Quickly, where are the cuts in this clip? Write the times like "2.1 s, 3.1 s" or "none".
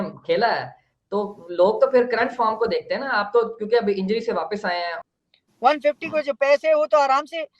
5.0 s